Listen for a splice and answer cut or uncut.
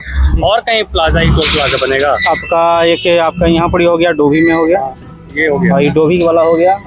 uncut